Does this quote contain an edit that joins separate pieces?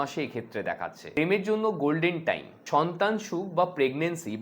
yes; 2 cuts; at 1.2 s, 2.5 s

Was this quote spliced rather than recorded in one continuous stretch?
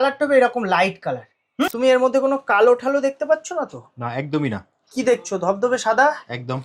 yes; 1 cut; at 1.7 s

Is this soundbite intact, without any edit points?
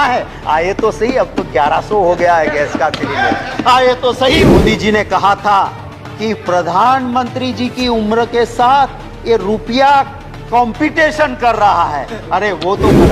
no; 1 cut; at 4.4 s

